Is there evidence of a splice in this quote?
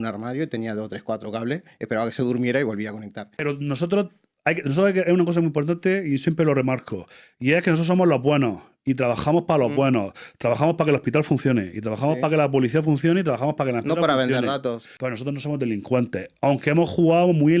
yes; 2 cuts; at 3.4 s, 14.9 s

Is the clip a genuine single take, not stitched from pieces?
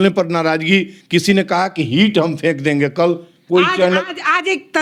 yes; 0 cuts

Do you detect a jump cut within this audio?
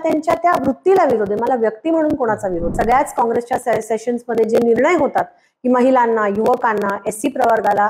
yes; 1 cut; at 2.7 s

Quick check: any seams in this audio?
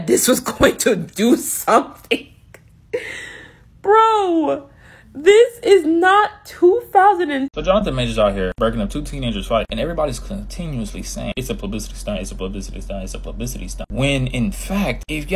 yes; 1 cut; at 7.5 s

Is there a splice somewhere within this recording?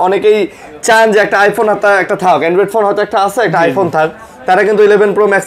no; 0 cuts

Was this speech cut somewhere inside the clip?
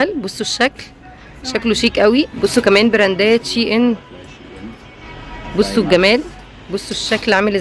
yes; 1 cut; at 2.3 s

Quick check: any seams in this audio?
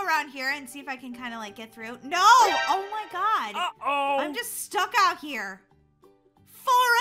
no; 0 cuts

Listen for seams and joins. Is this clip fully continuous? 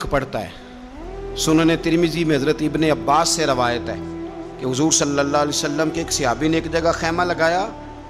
yes; 0 cuts

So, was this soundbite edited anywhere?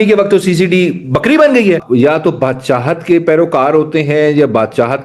yes; 1 cut; at 1.8 s

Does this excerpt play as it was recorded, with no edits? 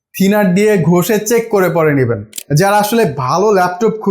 no; 1 cut; at 2.4 s

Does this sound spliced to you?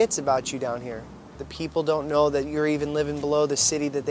yes; 1 cut; at 1.5 s

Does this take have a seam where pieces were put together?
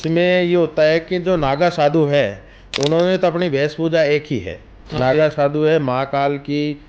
no; 0 cuts

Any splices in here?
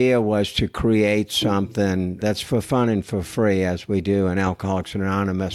yes; 1 cut; at 2.1 s

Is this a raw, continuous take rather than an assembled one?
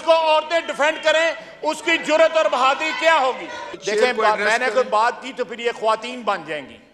no; 1 cut; at 3.7 s

